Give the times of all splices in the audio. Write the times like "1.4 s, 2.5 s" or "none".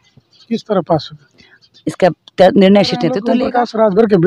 3.2 s